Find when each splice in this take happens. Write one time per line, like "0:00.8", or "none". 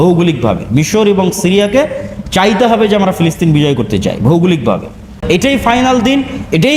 0:05.2